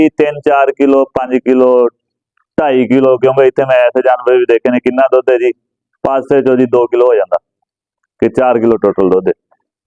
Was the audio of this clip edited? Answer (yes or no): no